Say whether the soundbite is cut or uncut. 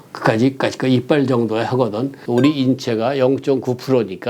cut